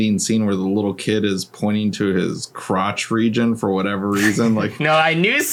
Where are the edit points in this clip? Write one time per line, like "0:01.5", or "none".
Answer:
none